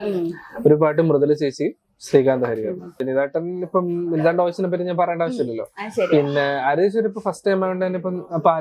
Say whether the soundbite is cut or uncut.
cut